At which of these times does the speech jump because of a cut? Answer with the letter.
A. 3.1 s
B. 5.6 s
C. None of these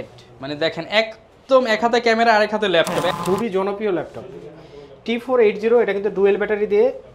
A